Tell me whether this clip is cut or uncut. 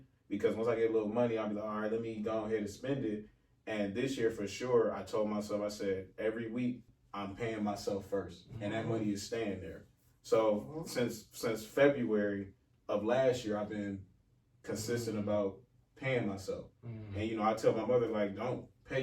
cut